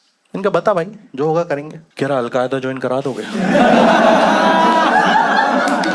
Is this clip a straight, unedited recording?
no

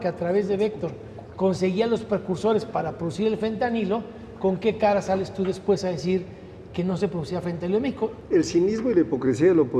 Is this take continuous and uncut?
no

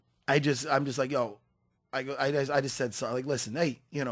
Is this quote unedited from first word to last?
no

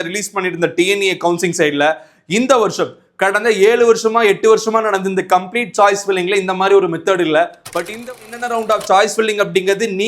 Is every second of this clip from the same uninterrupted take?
no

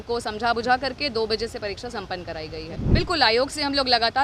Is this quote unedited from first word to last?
no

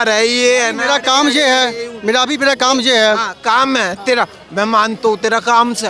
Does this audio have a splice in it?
no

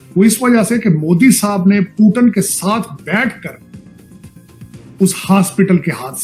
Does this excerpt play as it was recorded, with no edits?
yes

